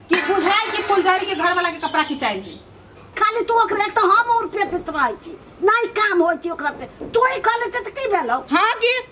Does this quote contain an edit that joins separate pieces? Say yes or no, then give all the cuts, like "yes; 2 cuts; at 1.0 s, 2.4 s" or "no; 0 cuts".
yes; 1 cut; at 3.1 s